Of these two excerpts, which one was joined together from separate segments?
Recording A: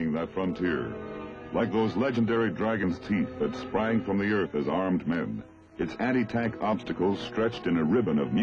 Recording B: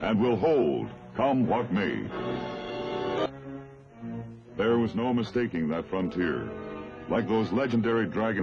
B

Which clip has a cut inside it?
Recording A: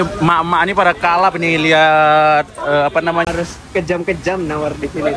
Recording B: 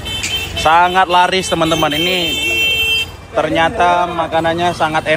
A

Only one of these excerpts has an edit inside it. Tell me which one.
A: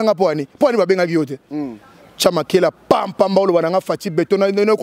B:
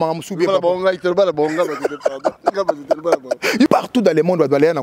B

